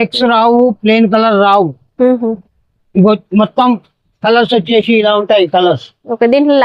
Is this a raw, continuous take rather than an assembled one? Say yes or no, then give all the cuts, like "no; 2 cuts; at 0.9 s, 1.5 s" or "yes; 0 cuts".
yes; 0 cuts